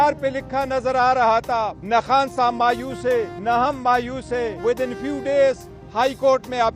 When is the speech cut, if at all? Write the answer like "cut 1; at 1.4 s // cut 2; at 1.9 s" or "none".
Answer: cut 1; at 1.4 s // cut 2; at 3.3 s // cut 3; at 4.5 s